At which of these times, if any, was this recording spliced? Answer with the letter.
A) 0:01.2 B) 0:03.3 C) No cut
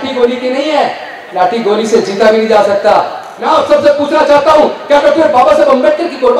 B